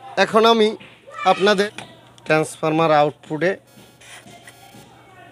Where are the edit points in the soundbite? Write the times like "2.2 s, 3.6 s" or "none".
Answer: 1.6 s